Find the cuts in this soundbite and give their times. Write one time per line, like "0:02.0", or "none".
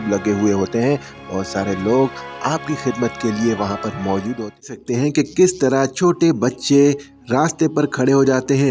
0:04.7